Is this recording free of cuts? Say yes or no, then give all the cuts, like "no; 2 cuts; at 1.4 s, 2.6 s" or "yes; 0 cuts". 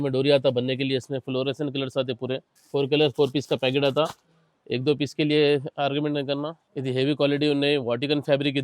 no; 2 cuts; at 2.5 s, 6.6 s